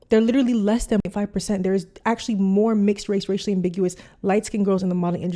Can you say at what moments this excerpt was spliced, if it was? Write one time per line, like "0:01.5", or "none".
0:01.1